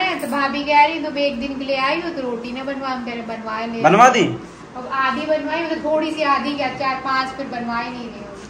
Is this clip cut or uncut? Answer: uncut